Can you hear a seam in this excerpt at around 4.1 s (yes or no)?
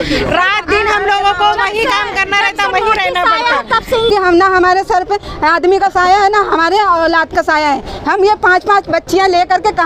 yes